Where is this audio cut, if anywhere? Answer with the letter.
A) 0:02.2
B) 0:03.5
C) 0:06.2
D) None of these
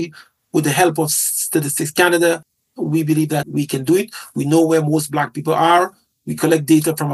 B